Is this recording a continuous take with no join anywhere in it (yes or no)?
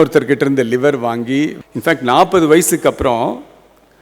no